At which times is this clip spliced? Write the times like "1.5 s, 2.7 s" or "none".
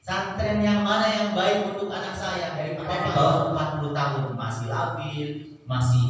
2.8 s